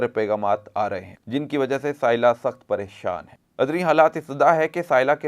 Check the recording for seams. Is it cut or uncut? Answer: cut